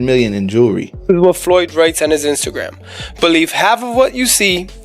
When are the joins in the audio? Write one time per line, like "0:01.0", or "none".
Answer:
0:01.1